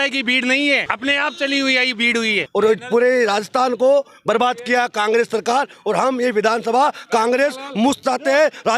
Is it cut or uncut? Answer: cut